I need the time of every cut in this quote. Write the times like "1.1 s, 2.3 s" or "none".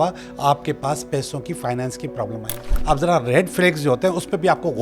2.8 s